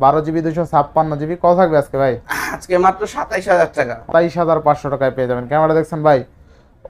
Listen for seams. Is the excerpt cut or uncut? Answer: cut